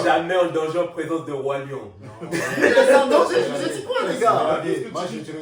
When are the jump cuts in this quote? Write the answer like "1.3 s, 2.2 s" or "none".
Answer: none